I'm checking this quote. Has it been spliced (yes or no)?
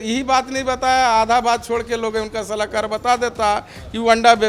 no